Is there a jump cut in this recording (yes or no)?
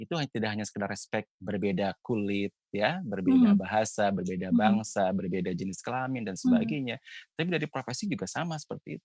no